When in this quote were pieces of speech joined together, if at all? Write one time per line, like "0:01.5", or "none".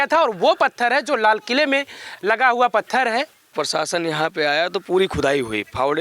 0:03.4